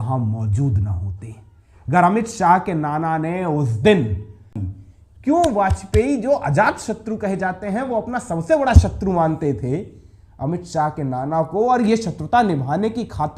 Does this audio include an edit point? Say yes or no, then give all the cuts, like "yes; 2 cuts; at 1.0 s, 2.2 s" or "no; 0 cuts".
yes; 1 cut; at 4.7 s